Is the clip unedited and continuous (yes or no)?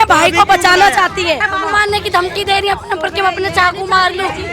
no